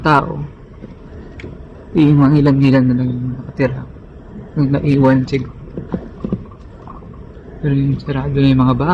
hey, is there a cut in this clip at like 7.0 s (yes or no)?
no